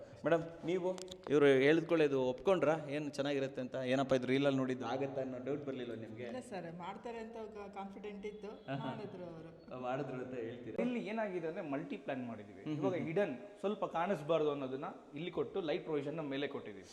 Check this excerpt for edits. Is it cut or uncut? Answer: cut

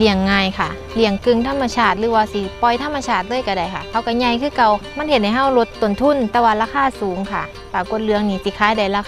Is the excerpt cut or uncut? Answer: uncut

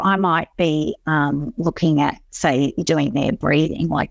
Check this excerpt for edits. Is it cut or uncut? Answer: uncut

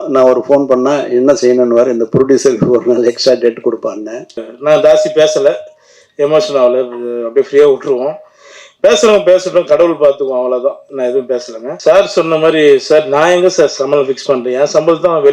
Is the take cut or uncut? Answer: cut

